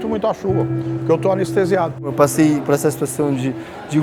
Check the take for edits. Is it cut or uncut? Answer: cut